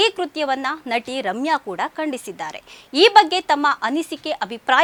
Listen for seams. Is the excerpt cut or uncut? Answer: uncut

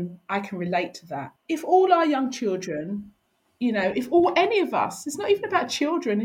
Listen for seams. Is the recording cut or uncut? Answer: cut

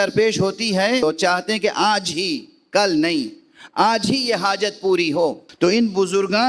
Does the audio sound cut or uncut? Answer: cut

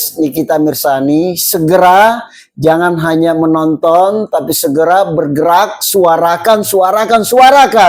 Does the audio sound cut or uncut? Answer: uncut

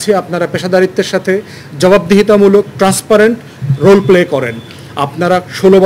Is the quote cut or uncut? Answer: uncut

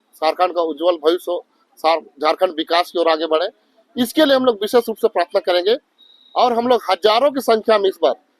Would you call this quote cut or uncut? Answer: uncut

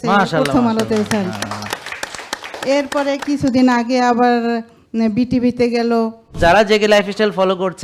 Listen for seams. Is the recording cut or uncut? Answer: cut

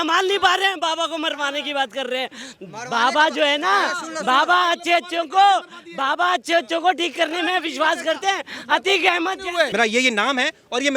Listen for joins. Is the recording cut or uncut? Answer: cut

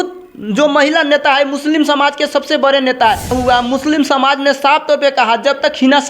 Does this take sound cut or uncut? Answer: cut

